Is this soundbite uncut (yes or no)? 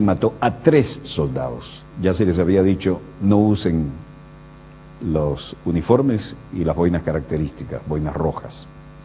yes